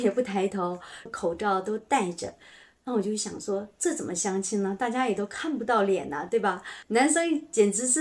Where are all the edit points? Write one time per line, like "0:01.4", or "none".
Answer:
0:01.1
0:06.7

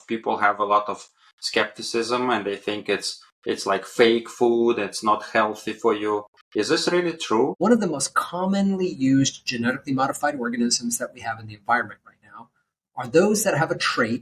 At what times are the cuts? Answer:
0:07.6

